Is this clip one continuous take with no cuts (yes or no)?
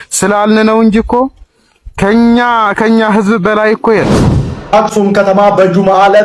no